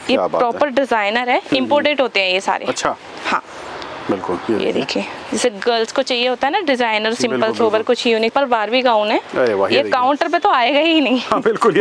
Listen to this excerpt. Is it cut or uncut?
cut